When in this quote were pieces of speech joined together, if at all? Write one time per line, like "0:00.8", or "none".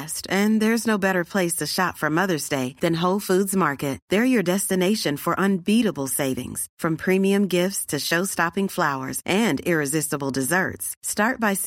none